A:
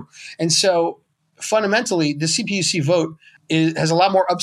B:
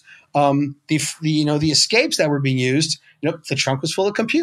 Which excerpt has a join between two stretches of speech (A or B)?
A